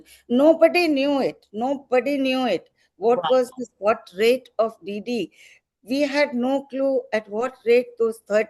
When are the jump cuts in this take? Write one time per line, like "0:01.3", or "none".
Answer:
none